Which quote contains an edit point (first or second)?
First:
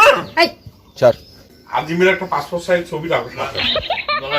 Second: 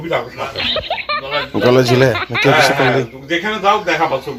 first